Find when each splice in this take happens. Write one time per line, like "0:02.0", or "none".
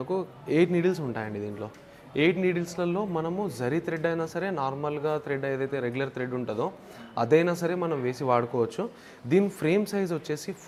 none